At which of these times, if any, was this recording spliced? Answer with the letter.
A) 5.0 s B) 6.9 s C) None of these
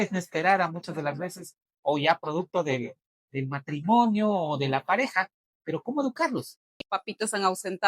B